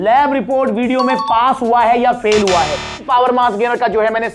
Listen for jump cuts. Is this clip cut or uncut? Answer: cut